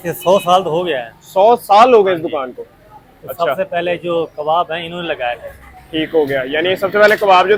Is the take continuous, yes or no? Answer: yes